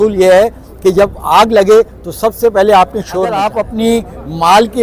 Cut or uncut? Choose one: cut